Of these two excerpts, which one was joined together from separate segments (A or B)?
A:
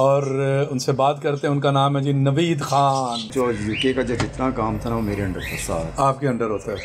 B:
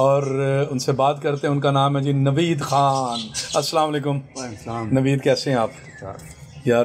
A